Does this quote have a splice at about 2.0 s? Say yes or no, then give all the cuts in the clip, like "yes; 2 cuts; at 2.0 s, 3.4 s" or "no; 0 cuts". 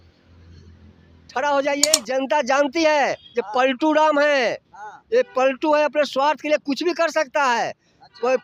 yes; 1 cut; at 2.0 s